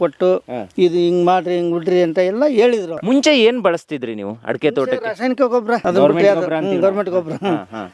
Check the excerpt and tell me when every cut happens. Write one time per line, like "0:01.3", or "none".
0:02.9
0:05.8